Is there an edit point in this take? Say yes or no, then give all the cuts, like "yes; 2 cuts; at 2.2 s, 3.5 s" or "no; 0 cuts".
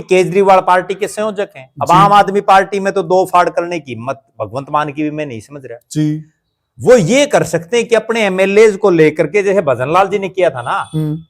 no; 0 cuts